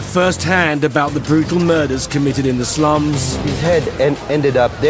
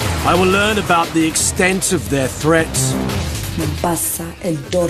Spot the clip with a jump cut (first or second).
first